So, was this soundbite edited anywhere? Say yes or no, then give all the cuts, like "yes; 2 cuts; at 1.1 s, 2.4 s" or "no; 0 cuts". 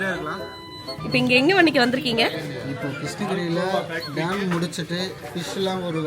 yes; 1 cut; at 1.0 s